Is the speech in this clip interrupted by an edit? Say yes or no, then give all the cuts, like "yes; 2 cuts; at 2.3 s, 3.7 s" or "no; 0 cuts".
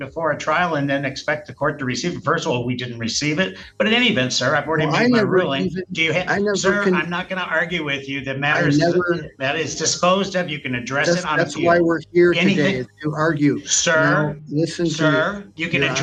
no; 0 cuts